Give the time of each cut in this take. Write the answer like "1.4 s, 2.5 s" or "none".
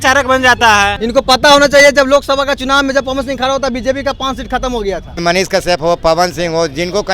1.0 s, 5.2 s

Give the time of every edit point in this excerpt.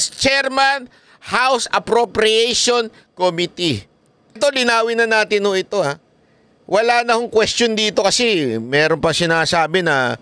4.4 s

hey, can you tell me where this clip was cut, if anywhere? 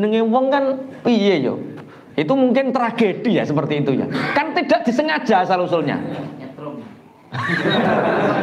none

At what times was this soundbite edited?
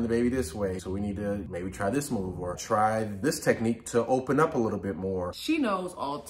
none

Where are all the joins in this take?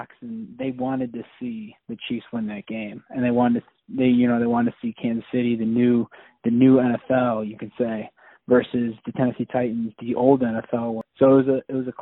11.0 s

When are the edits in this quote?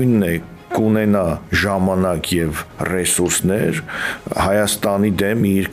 none

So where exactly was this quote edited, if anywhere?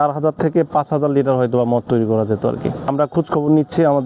2.8 s

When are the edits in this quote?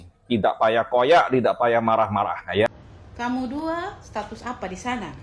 2.7 s

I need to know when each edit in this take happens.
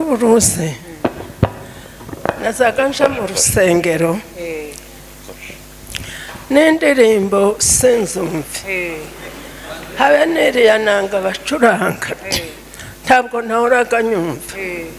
none

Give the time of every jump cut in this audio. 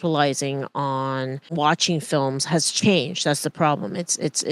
1.5 s

